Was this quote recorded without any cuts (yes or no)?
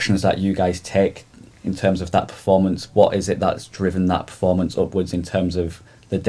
yes